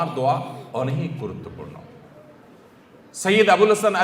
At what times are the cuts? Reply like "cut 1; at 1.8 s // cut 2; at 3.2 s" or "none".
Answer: none

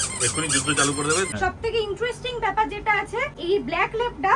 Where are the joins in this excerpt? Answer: cut 1; at 1.3 s // cut 2; at 3.3 s

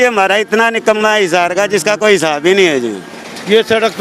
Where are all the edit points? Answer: cut 1; at 3.1 s

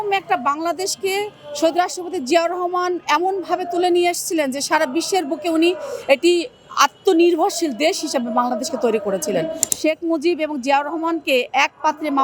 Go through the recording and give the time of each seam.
cut 1; at 9.6 s

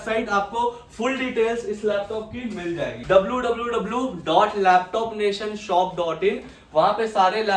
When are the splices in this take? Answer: cut 1; at 3.0 s

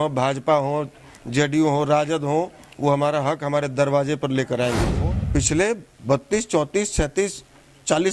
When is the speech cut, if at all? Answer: cut 1; at 4.9 s

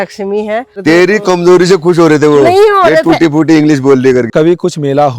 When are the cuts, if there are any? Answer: cut 1; at 0.8 s // cut 2; at 4.3 s

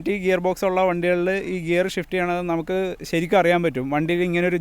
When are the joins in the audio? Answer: none

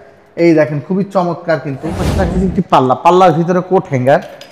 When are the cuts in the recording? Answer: cut 1; at 2.1 s

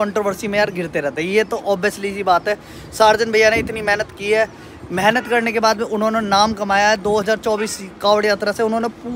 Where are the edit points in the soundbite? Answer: none

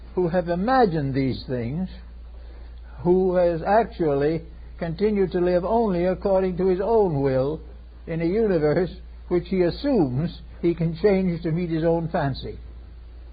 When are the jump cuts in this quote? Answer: none

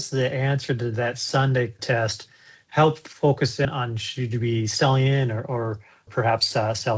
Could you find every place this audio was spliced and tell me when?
cut 1; at 1.8 s // cut 2; at 3.7 s // cut 3; at 6.1 s

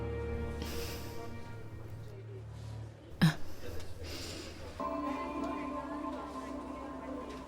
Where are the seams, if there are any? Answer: cut 1; at 4.8 s

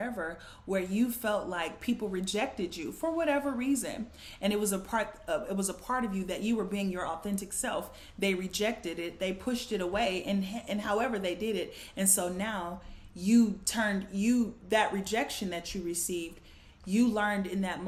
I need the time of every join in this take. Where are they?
none

